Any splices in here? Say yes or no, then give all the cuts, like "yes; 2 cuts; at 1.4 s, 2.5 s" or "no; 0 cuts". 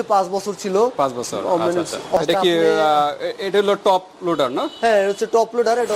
yes; 1 cut; at 2.2 s